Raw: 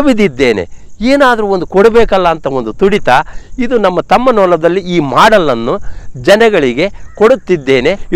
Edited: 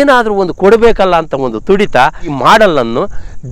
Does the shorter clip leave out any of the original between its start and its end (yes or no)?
yes